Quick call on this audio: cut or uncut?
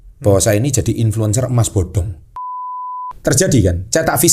cut